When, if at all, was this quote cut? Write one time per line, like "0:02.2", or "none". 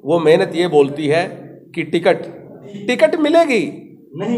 0:02.8